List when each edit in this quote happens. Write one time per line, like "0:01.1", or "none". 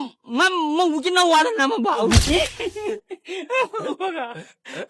0:02.2